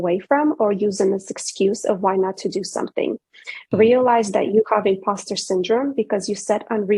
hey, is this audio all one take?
yes; 0 cuts

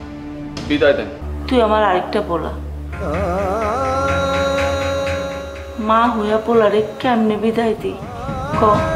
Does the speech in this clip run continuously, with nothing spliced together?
no; 1 cut; at 1.3 s

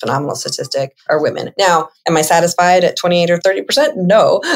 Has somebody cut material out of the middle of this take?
yes; 3 cuts; at 1.0 s, 1.9 s, 3.4 s

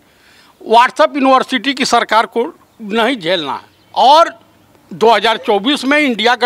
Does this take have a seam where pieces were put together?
yes; 1 cut; at 3.7 s

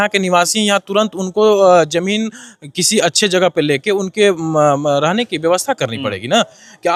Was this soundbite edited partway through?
no; 0 cuts

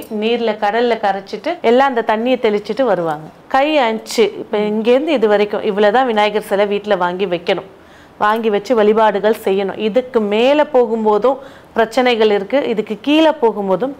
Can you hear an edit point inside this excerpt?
yes; 2 cuts; at 1.5 s, 3.3 s

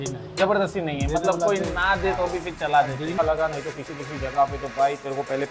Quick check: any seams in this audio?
yes; 1 cut; at 3.2 s

